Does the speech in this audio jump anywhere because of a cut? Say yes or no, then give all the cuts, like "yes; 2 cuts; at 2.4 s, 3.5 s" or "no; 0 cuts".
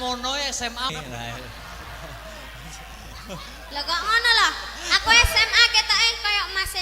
yes; 1 cut; at 0.9 s